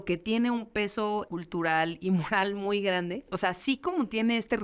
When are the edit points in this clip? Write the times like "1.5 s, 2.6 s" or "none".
1.3 s, 3.3 s